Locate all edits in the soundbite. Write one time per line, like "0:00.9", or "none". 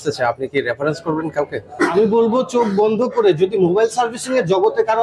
none